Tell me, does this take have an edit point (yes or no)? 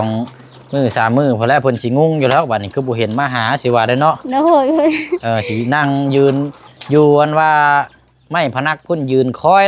no